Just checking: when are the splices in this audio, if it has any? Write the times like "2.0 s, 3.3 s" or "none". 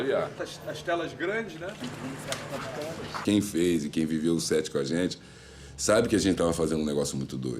none